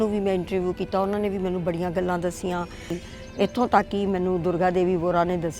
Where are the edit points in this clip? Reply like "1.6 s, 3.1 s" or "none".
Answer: 2.9 s